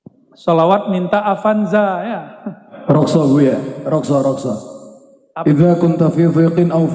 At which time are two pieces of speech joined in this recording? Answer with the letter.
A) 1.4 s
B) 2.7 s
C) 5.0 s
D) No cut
B